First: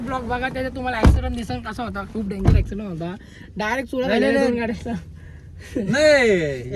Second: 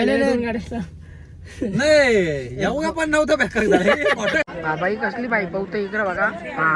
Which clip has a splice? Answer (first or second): second